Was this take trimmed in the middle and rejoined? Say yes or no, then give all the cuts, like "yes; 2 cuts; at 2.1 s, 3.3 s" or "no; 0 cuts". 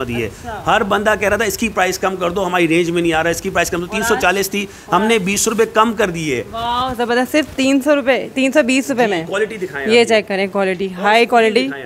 no; 0 cuts